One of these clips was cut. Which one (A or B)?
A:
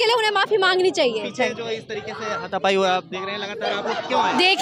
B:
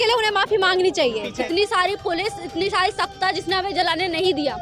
B